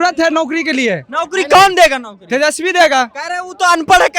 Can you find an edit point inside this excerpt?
no; 0 cuts

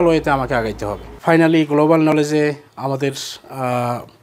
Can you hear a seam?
yes; 1 cut; at 1.1 s

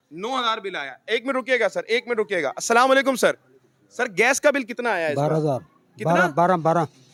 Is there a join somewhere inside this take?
no; 0 cuts

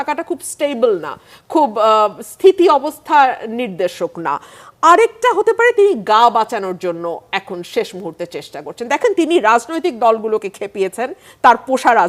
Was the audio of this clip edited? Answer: no; 0 cuts

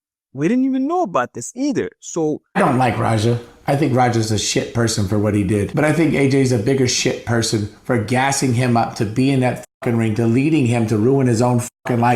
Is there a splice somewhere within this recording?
yes; 1 cut; at 2.6 s

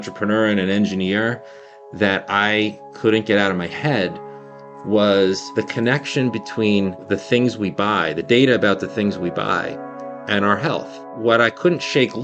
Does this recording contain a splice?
yes; 3 cuts; at 5.5 s, 7.0 s, 11.0 s

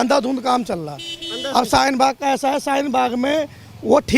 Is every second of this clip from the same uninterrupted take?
yes; 0 cuts

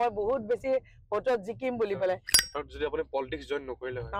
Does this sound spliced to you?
yes; 1 cut; at 2.3 s

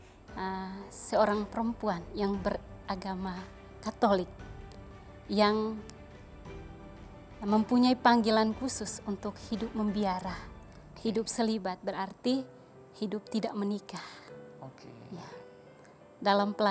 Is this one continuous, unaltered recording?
yes; 0 cuts

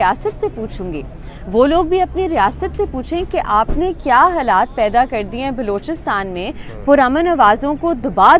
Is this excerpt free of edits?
yes; 0 cuts

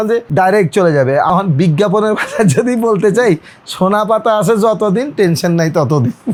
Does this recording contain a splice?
no; 0 cuts

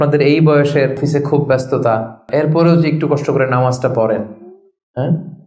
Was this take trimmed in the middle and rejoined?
yes; 2 cuts; at 1.0 s, 2.3 s

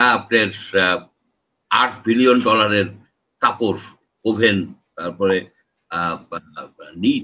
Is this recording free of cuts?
yes; 0 cuts

